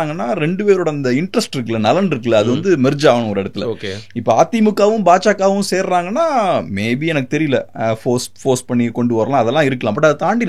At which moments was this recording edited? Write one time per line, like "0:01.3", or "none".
none